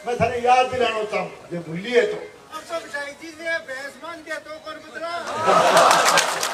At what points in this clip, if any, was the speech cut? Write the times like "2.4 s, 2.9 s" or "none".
none